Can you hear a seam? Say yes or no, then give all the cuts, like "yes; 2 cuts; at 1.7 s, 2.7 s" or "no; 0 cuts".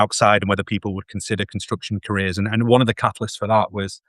no; 0 cuts